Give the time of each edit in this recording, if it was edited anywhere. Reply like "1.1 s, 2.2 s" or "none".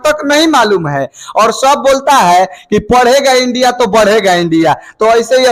none